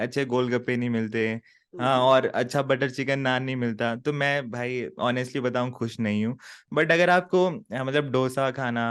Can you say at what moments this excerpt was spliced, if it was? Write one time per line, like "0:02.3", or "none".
none